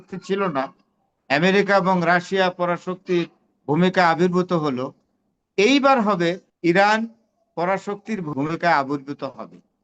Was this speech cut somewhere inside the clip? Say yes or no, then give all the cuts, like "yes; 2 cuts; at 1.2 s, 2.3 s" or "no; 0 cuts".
yes; 2 cuts; at 6.5 s, 8.3 s